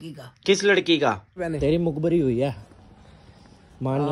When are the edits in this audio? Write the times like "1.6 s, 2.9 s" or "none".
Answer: 1.4 s